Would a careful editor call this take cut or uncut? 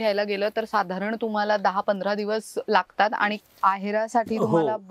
cut